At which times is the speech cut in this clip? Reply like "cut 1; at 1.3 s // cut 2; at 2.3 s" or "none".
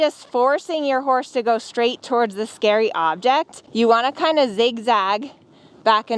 cut 1; at 3.6 s